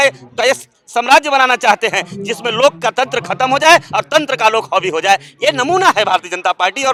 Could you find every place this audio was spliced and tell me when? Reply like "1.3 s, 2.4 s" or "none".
none